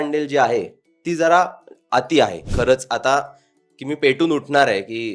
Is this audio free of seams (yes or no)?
no